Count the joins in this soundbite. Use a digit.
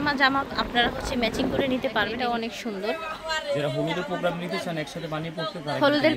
1